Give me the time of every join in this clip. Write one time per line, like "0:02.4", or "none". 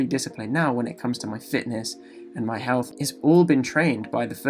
0:02.9